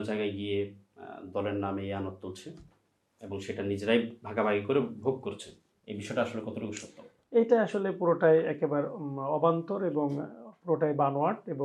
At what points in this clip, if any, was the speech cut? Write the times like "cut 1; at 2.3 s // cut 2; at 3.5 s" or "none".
none